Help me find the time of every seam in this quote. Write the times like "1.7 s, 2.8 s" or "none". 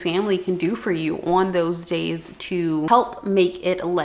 2.9 s